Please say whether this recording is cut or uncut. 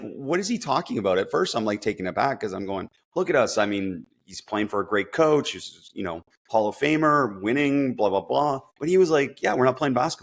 cut